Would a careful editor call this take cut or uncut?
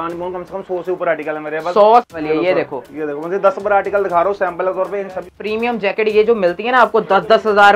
cut